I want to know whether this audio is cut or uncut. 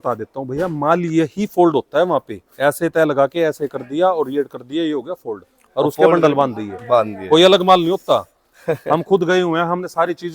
uncut